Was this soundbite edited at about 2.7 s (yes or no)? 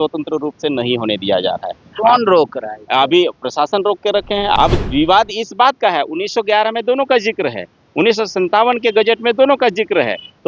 no